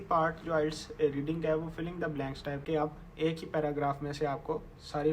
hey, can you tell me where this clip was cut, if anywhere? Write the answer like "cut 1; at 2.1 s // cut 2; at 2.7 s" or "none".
cut 1; at 2.8 s